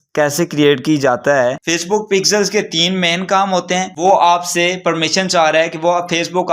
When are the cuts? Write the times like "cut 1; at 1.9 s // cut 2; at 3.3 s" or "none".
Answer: cut 1; at 1.6 s // cut 2; at 3.9 s